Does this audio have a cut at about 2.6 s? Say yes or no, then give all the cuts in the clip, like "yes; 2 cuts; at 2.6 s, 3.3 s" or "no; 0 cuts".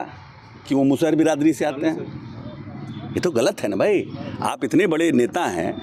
no; 0 cuts